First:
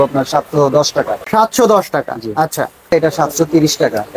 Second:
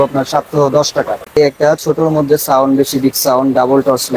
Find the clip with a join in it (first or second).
second